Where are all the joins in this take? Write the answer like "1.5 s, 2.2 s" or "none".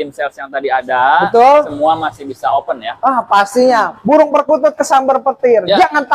none